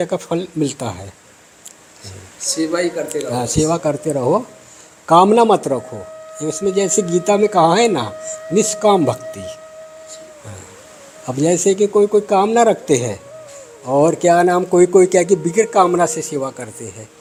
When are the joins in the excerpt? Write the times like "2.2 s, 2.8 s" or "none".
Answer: none